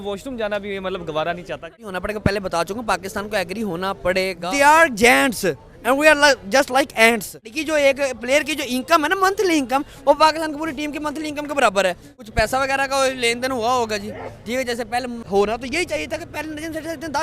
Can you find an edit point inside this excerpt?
yes; 5 cuts; at 1.8 s, 4.4 s, 7.6 s, 12.1 s, 15.2 s

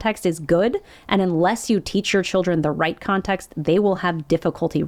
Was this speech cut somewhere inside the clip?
no; 0 cuts

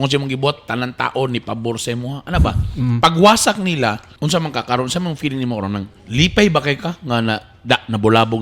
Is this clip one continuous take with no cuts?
no; 2 cuts; at 4.1 s, 6.0 s

